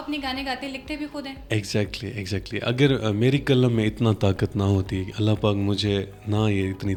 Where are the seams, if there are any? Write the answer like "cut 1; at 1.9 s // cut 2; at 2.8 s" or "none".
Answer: none